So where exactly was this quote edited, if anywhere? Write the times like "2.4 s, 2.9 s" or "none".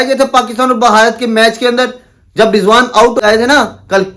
3.2 s